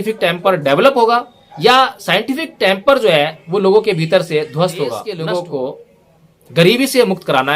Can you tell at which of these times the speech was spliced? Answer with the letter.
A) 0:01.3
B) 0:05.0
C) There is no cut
B